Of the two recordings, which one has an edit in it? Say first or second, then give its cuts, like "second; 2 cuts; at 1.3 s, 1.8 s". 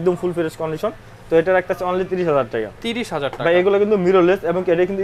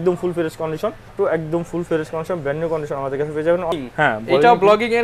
second; 2 cuts; at 1.1 s, 3.7 s